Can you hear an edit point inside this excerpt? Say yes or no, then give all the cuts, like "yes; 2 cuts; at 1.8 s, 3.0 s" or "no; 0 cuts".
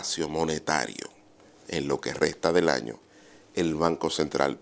no; 0 cuts